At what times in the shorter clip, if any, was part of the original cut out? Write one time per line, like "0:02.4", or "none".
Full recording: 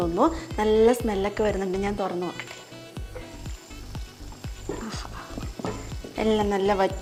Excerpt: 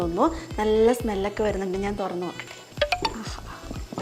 0:02.7